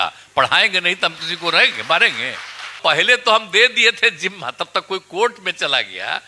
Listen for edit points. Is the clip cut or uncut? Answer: cut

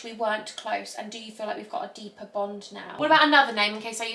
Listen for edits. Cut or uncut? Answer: cut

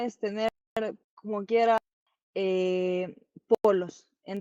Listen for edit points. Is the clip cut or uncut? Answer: cut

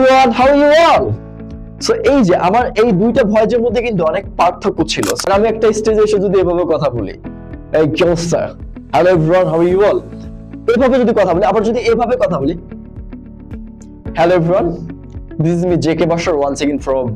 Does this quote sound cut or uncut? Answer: cut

